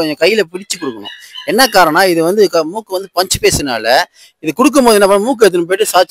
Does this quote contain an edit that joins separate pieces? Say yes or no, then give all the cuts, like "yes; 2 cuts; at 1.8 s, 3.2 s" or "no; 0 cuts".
no; 0 cuts